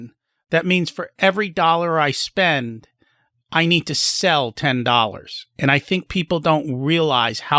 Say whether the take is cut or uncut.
uncut